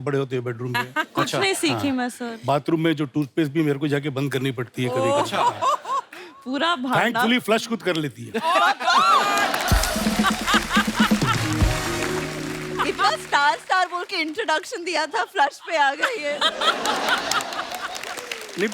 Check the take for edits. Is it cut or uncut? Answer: uncut